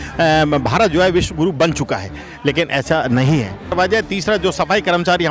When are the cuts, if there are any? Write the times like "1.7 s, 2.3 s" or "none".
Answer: 3.7 s